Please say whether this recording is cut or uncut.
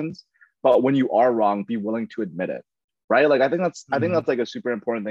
uncut